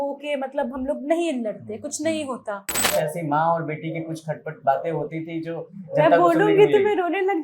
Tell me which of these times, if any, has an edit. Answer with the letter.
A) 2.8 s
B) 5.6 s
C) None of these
A